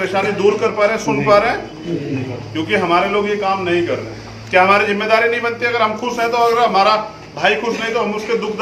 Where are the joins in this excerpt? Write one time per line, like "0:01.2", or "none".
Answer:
none